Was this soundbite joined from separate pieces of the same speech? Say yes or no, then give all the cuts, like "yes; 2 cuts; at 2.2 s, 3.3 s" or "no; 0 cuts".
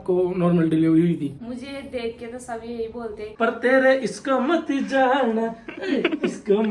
yes; 1 cut; at 3.2 s